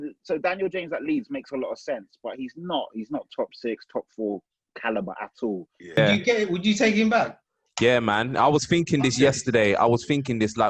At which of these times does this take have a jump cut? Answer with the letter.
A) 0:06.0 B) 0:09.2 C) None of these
A